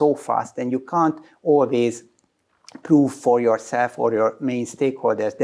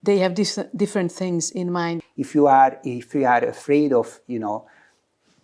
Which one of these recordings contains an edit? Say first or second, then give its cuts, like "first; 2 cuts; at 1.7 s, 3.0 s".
second; 1 cut; at 2.0 s